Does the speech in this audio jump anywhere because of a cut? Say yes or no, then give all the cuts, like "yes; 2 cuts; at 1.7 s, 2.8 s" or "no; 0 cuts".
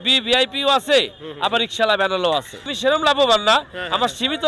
yes; 1 cut; at 2.7 s